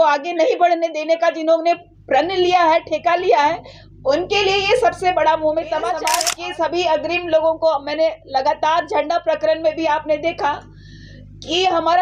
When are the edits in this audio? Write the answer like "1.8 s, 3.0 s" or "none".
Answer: 6.1 s